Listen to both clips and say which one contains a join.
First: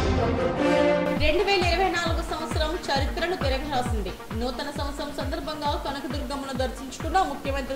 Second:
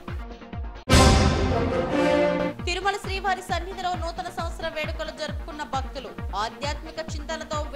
first; 1 cut; at 0.9 s

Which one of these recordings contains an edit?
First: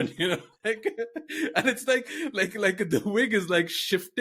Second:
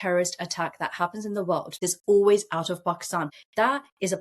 second; 2 cuts; at 1.8 s, 3.3 s

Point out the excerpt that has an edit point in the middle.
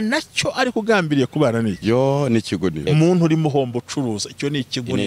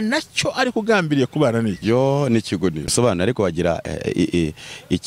first; 1 cut; at 2.9 s

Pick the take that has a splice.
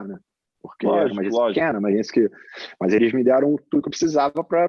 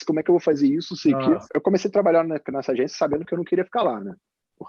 second; 1 cut; at 1.5 s

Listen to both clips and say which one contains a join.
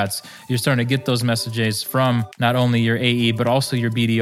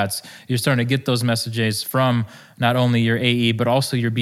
first; 1 cut; at 2.3 s

